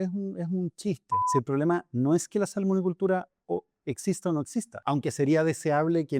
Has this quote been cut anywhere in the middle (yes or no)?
yes